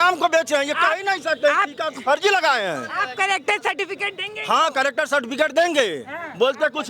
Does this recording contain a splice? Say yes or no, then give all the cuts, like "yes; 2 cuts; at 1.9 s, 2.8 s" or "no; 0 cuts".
no; 0 cuts